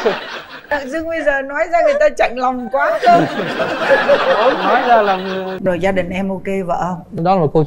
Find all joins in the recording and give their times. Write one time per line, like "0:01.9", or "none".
0:05.6